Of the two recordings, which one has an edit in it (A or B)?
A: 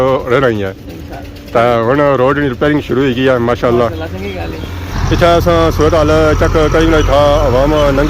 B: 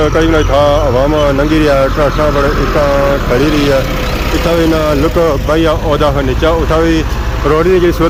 A